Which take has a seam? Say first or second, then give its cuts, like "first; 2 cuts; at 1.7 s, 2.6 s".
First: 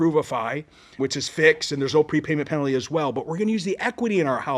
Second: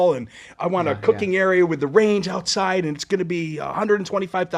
first; 1 cut; at 1.0 s